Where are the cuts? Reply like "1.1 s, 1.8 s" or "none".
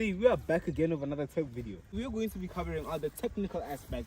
1.9 s